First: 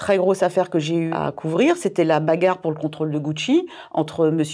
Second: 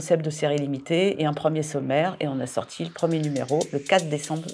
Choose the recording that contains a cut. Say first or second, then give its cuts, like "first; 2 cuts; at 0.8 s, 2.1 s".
first; 1 cut; at 1.1 s